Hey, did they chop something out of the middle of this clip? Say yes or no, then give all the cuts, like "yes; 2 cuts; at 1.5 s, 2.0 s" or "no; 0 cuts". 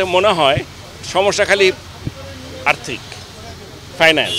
no; 0 cuts